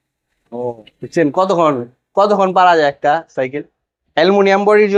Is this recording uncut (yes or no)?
yes